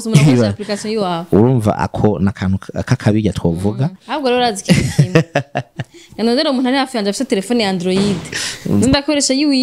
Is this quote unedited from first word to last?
no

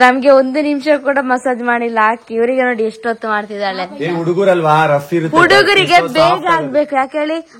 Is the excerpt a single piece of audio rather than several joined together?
yes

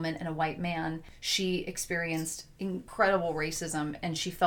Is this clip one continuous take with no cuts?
no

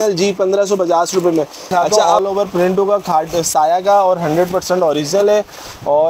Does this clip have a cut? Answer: yes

